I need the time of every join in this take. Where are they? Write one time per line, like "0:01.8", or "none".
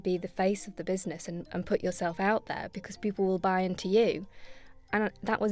none